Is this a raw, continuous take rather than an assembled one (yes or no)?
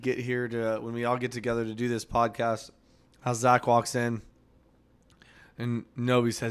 no